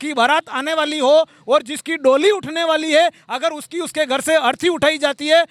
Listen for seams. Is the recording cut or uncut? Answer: uncut